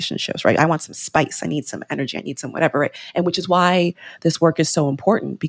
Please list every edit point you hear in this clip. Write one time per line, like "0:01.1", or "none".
0:03.0